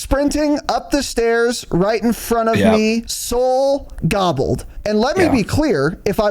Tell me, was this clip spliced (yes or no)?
yes